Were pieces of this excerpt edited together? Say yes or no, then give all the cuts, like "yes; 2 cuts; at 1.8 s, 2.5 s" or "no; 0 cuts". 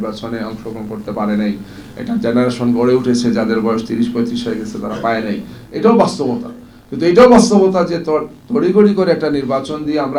no; 0 cuts